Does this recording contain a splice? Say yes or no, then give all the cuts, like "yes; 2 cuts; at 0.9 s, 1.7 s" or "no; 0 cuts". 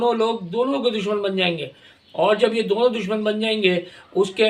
no; 0 cuts